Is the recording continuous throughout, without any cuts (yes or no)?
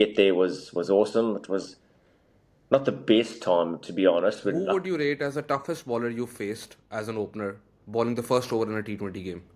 no